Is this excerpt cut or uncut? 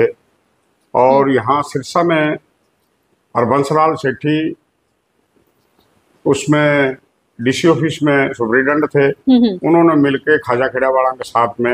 uncut